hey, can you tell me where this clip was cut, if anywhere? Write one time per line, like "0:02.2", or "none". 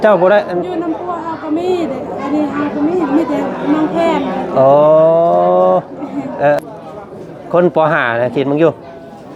0:06.6